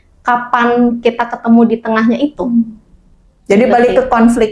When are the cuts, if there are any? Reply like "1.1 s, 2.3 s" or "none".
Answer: none